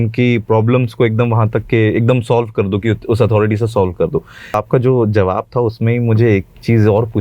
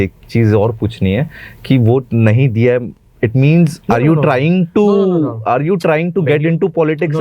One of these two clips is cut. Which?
first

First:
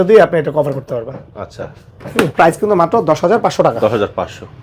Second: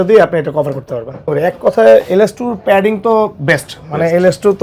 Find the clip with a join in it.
second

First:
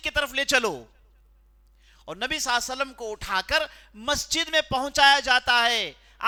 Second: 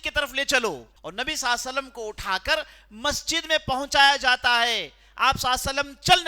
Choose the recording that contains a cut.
second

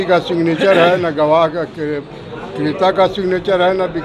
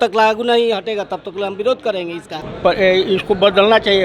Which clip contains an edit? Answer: second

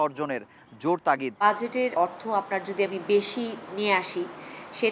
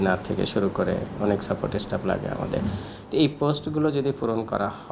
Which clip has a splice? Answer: first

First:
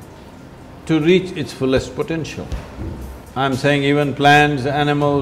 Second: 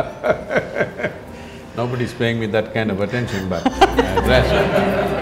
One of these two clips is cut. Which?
first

